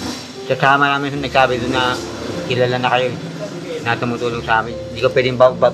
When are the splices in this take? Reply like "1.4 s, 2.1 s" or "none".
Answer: none